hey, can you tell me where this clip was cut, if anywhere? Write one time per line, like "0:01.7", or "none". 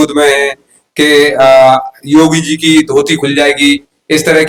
none